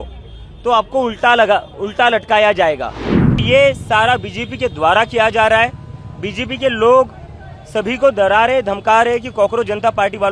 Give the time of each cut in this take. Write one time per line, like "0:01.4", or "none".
0:03.4

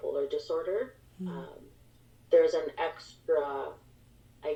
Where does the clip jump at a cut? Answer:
none

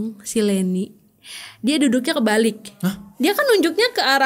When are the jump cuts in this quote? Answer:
0:03.1

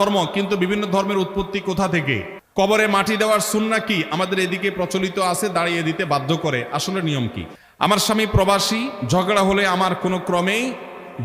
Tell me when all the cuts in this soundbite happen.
0:02.4
0:07.4

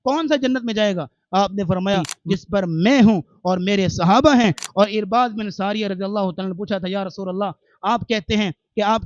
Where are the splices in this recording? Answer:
0:02.1

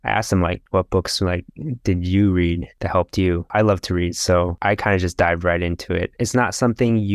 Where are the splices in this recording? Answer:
0:03.5
0:06.1

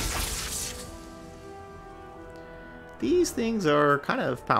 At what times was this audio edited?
none

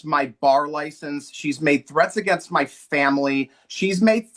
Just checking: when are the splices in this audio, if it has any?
none

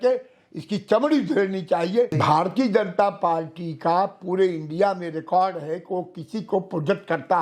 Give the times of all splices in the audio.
0:02.1

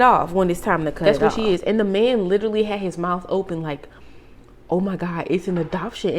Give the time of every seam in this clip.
0:01.0

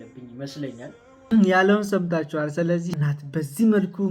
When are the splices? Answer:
0:01.3
0:02.9

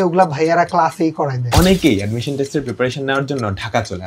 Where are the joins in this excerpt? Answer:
0:01.4

